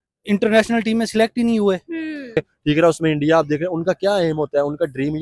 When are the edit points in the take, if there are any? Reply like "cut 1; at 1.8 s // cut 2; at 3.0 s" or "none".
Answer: cut 1; at 2.5 s